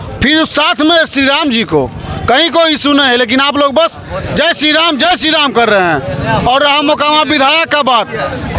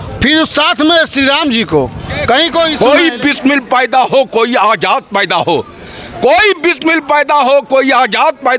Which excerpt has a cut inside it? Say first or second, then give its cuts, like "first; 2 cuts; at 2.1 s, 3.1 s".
second; 1 cut; at 2.7 s